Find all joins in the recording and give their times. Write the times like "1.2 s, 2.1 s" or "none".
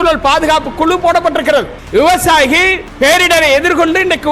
1.8 s, 2.8 s